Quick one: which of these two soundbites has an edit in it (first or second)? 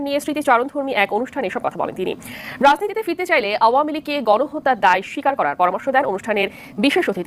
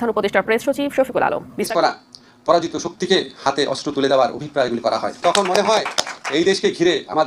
second